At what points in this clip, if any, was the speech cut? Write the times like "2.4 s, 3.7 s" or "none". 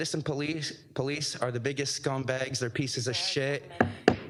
none